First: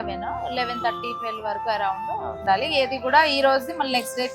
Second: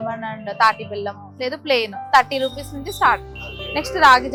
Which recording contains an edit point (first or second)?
first